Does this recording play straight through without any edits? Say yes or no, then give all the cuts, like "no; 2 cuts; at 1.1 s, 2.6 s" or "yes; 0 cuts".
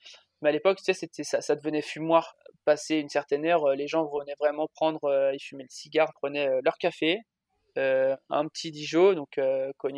no; 2 cuts; at 2.4 s, 6.2 s